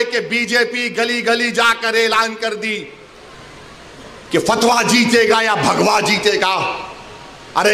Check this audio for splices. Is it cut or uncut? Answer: uncut